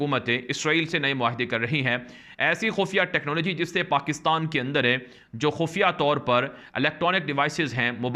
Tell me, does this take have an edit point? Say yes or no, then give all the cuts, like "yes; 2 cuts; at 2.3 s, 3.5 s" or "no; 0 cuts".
no; 0 cuts